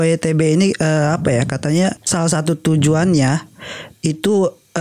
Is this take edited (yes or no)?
yes